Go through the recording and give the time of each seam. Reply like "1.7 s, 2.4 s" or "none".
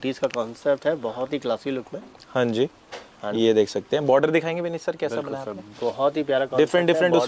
none